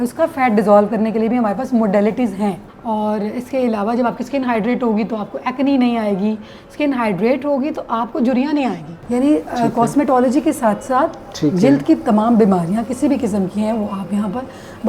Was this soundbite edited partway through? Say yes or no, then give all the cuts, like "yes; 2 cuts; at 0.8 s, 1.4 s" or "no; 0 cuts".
yes; 2 cuts; at 2.7 s, 9.0 s